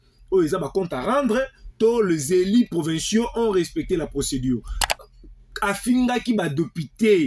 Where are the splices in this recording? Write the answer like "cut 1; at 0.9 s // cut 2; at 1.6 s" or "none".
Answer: cut 1; at 4.8 s